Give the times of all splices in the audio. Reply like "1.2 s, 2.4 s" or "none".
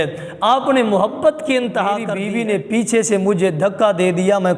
2.2 s